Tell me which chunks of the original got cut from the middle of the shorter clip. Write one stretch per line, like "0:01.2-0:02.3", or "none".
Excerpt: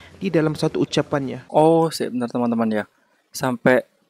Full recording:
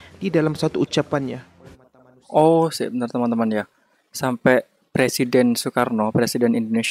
0:01.4-0:02.2